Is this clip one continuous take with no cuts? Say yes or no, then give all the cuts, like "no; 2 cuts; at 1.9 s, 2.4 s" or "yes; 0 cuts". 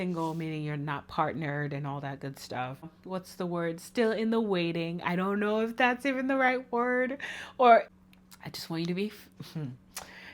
no; 2 cuts; at 3.0 s, 7.9 s